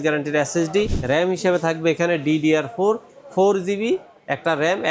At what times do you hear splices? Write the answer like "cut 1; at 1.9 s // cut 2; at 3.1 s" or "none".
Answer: cut 1; at 1.0 s